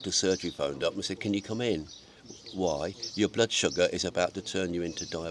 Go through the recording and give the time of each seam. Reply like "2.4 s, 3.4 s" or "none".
none